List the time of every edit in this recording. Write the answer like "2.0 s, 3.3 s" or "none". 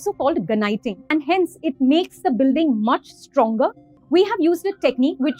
1.0 s, 3.9 s